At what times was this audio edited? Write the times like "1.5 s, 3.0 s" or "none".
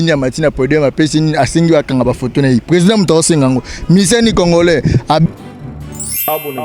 5.2 s